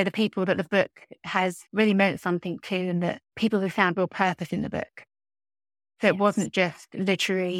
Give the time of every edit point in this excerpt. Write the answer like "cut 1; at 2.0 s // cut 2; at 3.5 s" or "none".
cut 1; at 1.6 s